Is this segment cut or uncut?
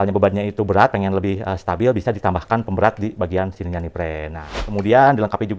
cut